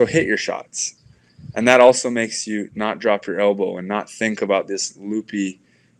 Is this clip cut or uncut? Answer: uncut